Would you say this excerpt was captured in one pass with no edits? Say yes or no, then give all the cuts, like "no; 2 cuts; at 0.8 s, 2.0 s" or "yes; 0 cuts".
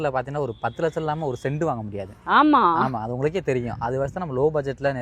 yes; 0 cuts